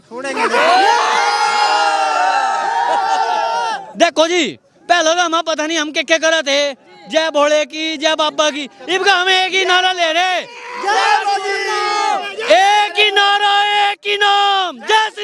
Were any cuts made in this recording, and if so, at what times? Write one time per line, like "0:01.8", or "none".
none